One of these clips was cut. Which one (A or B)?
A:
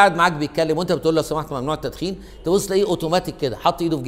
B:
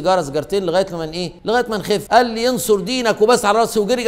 B